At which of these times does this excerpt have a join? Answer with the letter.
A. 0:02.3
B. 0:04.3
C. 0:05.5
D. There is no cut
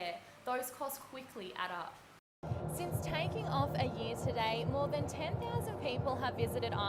A